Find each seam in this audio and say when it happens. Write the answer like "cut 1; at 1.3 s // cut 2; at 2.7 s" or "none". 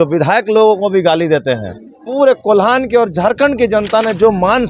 cut 1; at 2.0 s